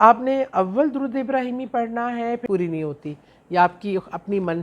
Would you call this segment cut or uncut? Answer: cut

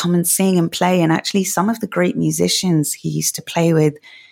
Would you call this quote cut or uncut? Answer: uncut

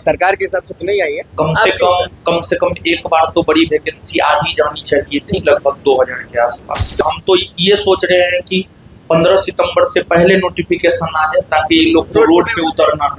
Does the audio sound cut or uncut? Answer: cut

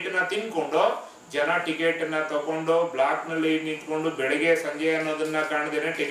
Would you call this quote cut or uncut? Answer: uncut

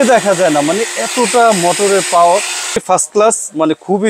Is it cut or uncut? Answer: cut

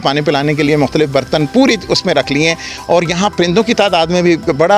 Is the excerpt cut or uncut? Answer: uncut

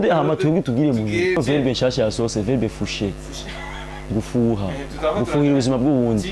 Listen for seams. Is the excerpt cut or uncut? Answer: cut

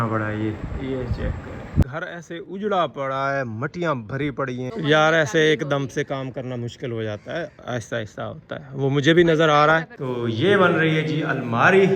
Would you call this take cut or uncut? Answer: cut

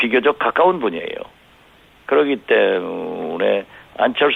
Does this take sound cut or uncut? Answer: uncut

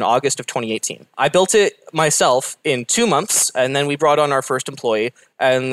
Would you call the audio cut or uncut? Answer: cut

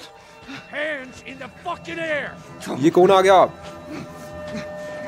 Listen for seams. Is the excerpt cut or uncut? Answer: uncut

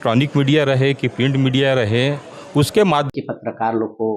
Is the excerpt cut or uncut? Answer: cut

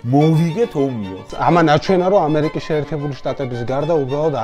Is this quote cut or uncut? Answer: cut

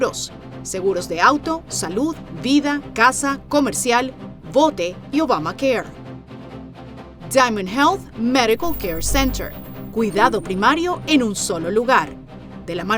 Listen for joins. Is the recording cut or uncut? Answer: uncut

